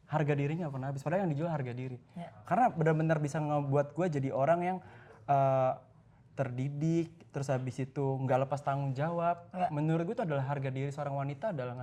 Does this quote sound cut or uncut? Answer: uncut